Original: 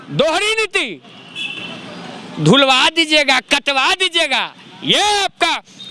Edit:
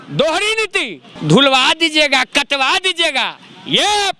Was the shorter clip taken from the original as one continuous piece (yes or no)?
no